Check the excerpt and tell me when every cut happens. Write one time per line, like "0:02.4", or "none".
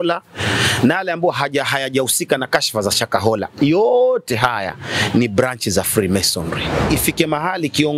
0:06.9